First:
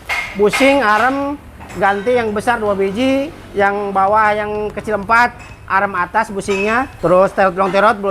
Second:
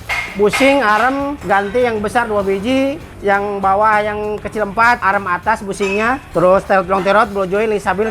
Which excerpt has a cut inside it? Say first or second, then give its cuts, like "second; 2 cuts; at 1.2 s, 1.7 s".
second; 2 cuts; at 1.4 s, 5.0 s